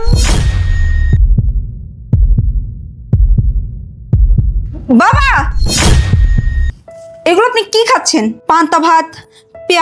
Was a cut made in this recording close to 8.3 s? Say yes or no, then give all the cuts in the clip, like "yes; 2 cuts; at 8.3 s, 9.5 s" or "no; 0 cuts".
no; 0 cuts